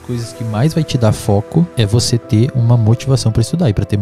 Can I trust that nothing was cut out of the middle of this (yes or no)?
no